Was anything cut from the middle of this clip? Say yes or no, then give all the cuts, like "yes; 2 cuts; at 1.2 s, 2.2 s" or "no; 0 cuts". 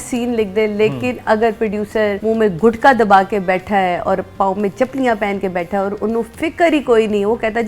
yes; 1 cut; at 2.2 s